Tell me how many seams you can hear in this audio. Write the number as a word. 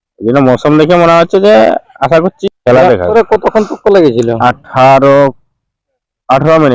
two